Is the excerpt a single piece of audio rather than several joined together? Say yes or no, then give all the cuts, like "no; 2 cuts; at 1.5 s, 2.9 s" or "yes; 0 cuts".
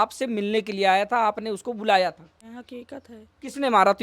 no; 1 cut; at 2.3 s